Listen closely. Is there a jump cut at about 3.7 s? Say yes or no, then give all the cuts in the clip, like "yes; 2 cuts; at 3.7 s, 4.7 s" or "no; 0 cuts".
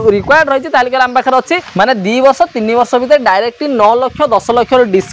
no; 1 cut; at 1.6 s